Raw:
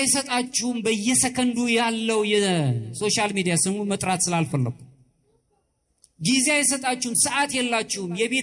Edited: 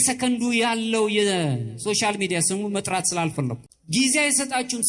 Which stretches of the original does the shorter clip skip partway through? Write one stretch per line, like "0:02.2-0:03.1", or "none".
0:04.9-0:06.0